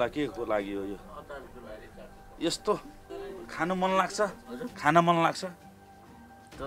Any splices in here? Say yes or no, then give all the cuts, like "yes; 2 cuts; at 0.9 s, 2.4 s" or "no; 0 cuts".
no; 0 cuts